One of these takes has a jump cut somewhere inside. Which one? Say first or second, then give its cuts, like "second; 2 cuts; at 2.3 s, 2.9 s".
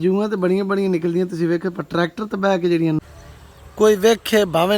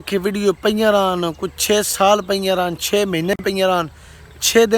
first; 1 cut; at 3.0 s